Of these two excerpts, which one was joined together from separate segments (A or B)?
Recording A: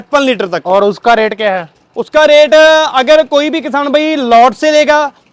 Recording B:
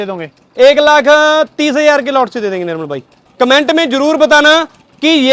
B